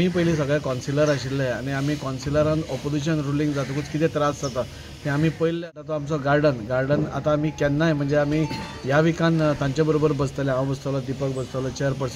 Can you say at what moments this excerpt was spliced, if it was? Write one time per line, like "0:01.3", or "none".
0:06.0